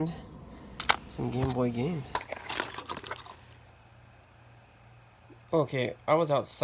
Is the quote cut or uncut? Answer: cut